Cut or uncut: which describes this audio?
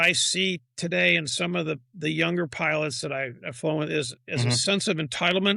uncut